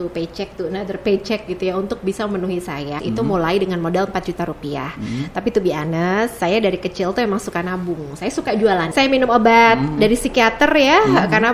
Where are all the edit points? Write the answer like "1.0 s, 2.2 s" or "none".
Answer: 3.0 s, 8.9 s